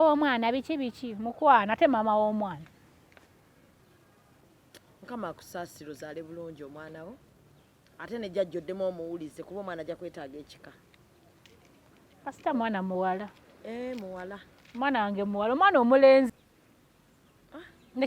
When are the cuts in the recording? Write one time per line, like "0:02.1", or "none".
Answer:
0:03.8
0:16.3

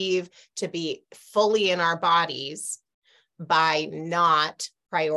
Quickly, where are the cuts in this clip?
none

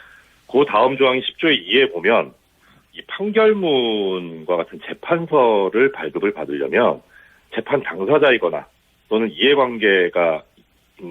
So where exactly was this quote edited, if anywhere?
0:01.6

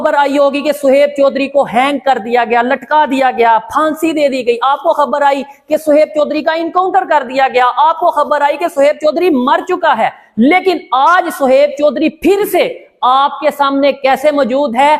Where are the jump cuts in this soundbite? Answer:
none

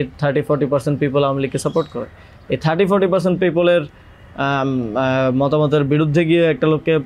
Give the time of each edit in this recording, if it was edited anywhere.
none

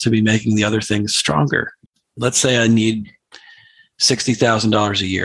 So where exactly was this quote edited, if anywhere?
0:01.8

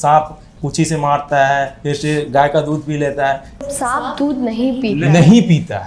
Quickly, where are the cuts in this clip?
0:03.6

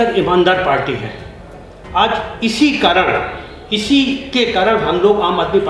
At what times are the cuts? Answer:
none

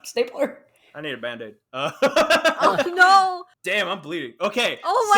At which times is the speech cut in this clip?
0:03.8

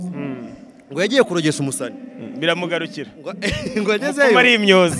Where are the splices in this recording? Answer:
none

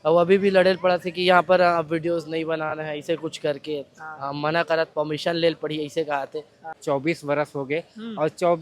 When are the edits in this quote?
0:06.7

